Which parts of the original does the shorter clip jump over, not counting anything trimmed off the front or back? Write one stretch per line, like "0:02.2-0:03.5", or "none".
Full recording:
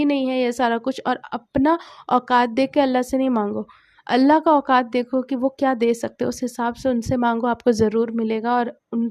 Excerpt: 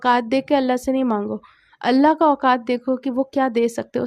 none